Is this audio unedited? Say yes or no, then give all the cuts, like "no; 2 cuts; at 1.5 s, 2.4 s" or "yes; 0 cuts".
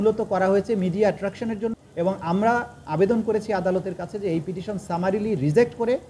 no; 1 cut; at 1.6 s